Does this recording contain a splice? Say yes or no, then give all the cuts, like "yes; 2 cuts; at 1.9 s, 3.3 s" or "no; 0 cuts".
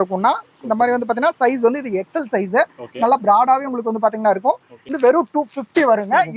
yes; 1 cut; at 4.9 s